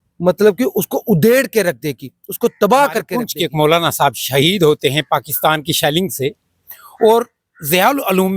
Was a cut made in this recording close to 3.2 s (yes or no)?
yes